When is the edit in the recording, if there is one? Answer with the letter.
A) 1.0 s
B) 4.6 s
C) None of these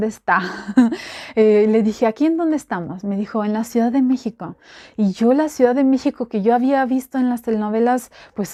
C